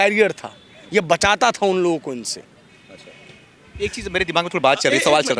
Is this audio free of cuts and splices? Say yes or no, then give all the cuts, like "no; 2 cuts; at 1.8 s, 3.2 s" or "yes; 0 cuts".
yes; 0 cuts